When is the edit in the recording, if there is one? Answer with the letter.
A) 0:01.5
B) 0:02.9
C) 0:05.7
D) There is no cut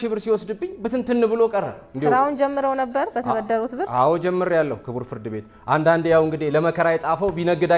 D